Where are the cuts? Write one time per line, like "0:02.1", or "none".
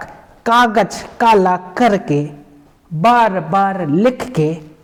none